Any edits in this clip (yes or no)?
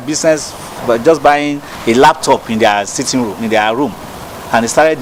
no